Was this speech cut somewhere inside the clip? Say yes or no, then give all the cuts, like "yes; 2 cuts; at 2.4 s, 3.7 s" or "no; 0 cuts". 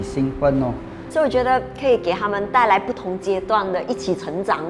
yes; 1 cut; at 1.0 s